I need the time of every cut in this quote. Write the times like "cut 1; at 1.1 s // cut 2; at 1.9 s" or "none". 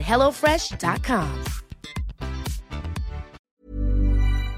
cut 1; at 3.4 s